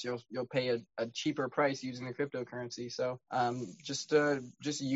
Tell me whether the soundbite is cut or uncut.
cut